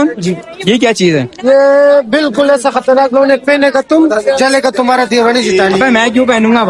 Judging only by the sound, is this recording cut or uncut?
uncut